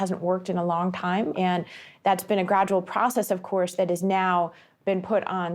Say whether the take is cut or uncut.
cut